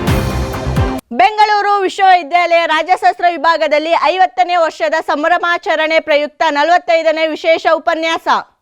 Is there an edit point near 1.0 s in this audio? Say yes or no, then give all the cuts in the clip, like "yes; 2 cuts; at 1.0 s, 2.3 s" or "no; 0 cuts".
yes; 1 cut; at 1.0 s